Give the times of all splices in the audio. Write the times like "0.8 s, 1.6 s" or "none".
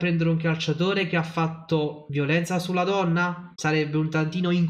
2.0 s, 3.5 s